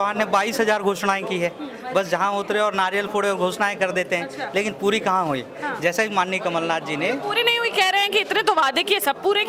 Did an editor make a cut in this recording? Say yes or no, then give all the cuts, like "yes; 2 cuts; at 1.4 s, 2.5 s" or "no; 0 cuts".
no; 0 cuts